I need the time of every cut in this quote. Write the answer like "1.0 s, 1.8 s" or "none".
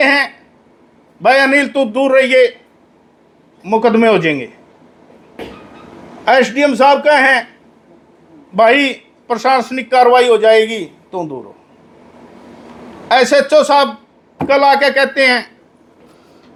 none